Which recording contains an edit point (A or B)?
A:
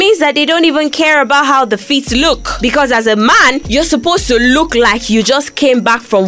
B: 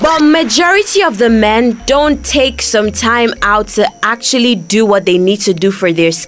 A